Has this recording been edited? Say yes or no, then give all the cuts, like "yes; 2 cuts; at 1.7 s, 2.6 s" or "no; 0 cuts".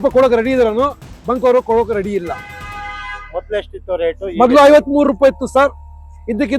no; 0 cuts